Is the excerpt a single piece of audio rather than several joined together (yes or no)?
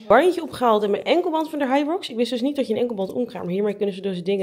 yes